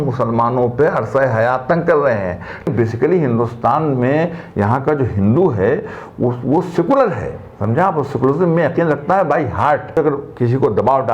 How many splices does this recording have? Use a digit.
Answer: 2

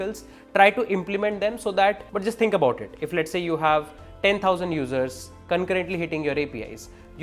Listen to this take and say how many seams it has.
1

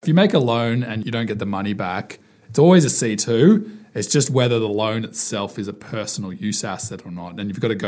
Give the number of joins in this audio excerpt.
1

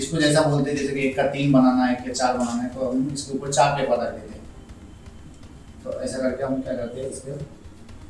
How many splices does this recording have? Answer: 0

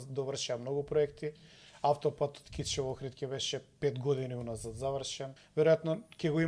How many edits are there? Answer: 1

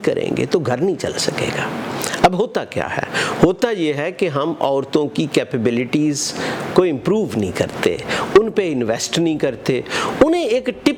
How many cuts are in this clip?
0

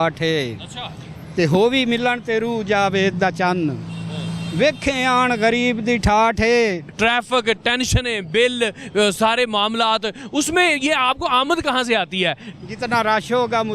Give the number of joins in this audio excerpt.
2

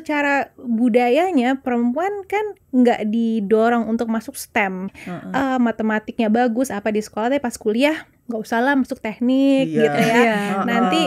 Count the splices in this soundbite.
2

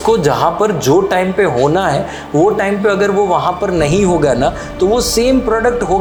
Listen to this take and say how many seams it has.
0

